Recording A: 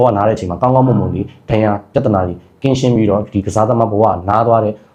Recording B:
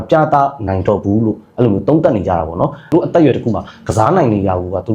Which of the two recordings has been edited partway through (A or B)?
B